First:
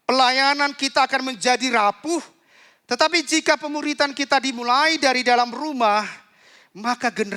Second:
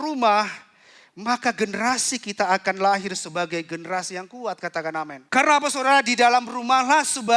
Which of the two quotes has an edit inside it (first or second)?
second